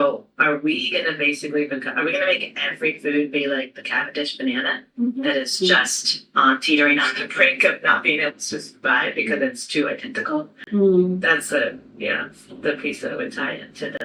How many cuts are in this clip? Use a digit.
0